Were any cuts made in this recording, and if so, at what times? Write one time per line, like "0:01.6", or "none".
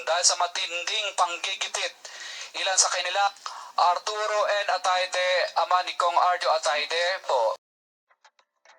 0:07.6